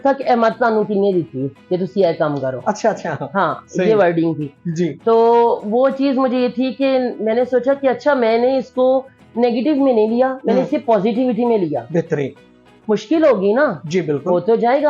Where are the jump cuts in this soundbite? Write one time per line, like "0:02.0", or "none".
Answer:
none

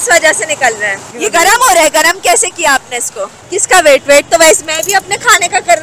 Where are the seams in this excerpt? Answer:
0:01.1
0:03.4

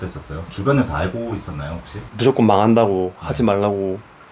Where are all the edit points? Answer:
0:02.0

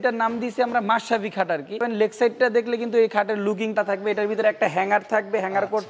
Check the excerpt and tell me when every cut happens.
0:01.8
0:03.7

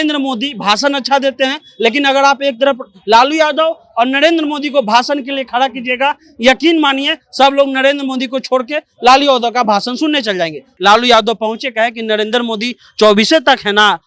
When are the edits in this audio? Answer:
0:10.7

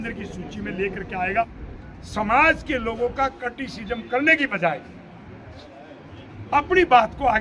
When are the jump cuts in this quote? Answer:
0:01.6

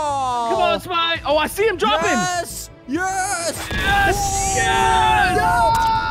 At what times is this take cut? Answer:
none

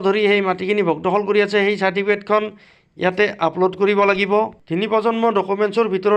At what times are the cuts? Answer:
none

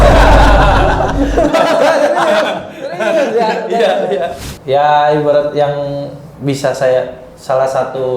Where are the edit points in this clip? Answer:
0:04.5

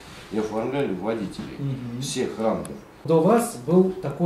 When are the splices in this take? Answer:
0:03.0

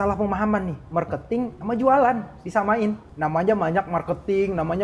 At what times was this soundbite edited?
none

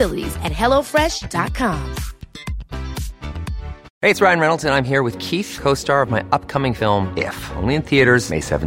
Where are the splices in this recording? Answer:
0:03.8

